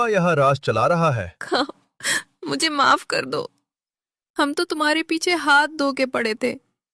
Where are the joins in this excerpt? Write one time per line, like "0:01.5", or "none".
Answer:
0:01.3